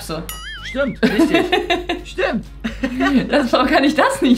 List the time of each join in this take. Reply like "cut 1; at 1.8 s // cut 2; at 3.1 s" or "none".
none

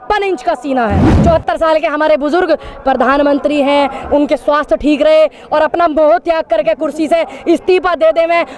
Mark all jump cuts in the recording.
cut 1; at 1.1 s

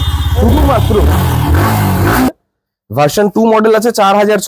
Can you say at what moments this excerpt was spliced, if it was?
cut 1; at 2.3 s

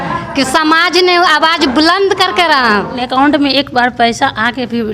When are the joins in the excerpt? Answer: cut 1; at 3.0 s

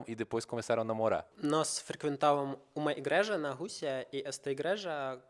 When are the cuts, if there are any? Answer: none

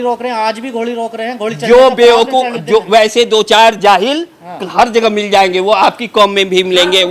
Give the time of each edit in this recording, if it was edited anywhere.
none

